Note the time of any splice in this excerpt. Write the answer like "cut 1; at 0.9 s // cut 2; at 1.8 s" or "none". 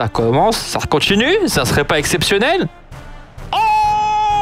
none